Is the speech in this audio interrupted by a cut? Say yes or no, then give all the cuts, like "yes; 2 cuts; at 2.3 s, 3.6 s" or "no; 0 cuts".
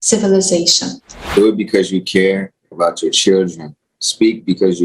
yes; 1 cut; at 1.1 s